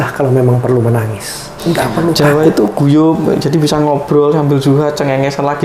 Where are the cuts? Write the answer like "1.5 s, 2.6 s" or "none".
2.2 s